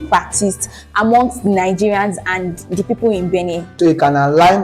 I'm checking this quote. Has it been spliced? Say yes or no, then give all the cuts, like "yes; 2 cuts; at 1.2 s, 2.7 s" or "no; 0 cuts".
yes; 1 cut; at 3.7 s